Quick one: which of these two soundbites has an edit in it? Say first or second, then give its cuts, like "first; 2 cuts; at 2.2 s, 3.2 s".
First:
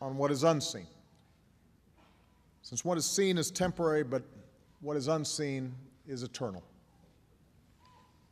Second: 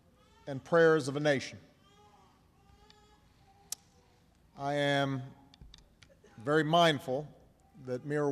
second; 1 cut; at 3.2 s